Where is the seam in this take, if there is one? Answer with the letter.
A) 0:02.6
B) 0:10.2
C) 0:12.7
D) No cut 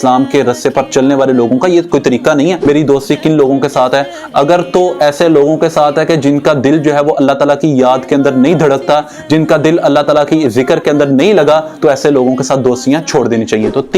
A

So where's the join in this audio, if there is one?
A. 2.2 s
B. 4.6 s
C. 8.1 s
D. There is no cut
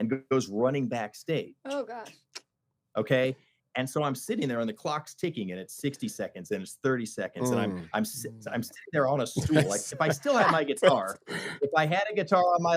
D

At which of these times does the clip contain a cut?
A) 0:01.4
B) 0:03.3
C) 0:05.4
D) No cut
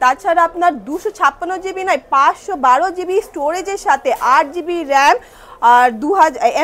D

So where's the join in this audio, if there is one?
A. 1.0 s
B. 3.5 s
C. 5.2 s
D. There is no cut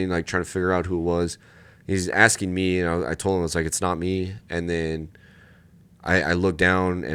D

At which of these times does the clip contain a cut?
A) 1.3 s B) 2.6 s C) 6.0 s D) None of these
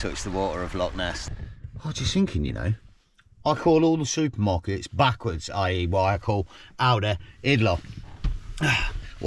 A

